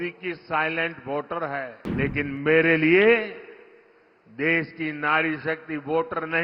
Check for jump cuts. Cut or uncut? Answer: cut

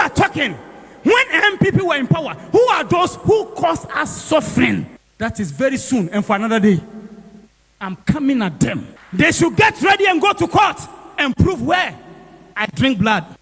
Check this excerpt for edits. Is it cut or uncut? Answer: uncut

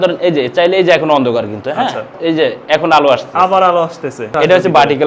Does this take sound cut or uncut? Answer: cut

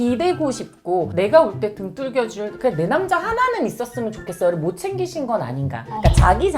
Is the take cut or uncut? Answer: uncut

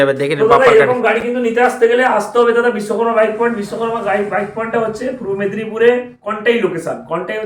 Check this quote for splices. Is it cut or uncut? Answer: uncut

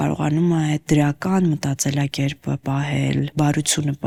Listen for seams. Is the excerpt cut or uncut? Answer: uncut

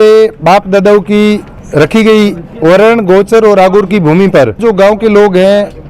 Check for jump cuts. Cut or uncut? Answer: cut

